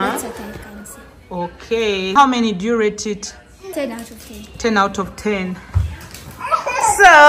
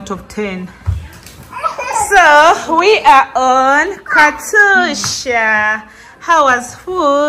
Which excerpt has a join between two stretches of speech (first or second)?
first